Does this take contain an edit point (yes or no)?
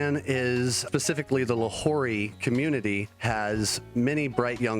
yes